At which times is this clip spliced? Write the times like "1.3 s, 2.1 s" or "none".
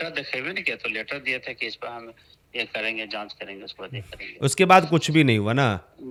none